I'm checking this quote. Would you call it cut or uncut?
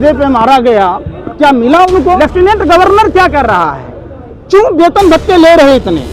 cut